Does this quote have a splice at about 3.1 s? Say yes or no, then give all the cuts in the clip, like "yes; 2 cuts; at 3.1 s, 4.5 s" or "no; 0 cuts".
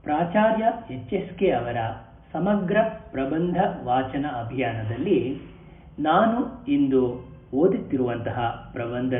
yes; 1 cut; at 3.1 s